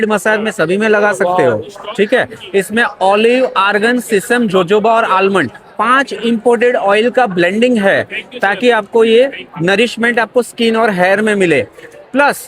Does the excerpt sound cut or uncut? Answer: uncut